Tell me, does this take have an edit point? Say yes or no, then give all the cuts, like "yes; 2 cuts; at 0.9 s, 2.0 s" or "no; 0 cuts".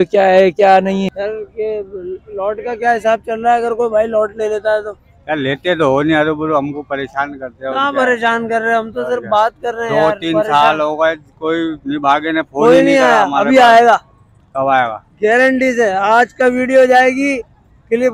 yes; 1 cut; at 1.1 s